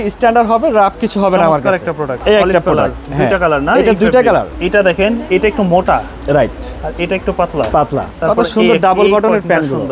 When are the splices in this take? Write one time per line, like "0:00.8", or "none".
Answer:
0:02.1
0:04.5
0:08.1